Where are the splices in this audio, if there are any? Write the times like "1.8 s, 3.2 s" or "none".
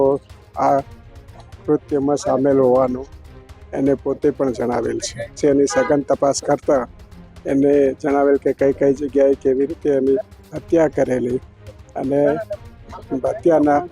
5.3 s